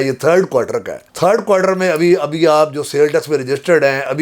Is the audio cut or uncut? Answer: uncut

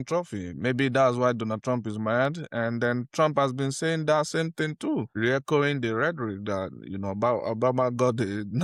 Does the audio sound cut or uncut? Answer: uncut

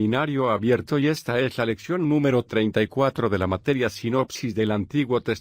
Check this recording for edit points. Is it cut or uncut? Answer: uncut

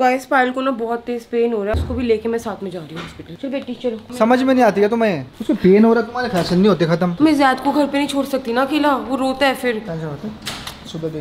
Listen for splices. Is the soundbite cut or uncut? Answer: cut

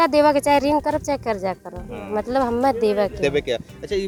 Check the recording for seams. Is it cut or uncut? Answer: uncut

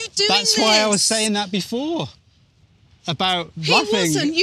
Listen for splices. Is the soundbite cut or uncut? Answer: uncut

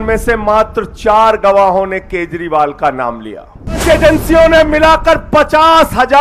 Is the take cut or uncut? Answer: cut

